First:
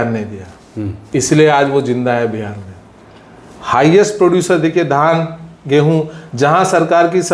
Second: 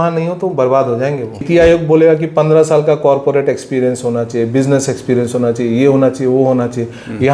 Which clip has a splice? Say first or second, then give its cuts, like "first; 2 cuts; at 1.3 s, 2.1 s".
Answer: second; 1 cut; at 1.4 s